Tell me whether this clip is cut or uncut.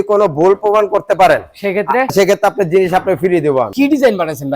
cut